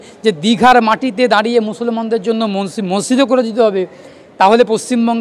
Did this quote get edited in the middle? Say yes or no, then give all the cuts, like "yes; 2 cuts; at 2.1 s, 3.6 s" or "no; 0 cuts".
no; 0 cuts